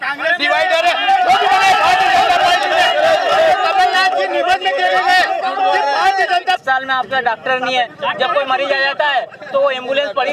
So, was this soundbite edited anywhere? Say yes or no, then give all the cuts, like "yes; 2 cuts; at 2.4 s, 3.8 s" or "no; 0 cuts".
yes; 1 cut; at 6.6 s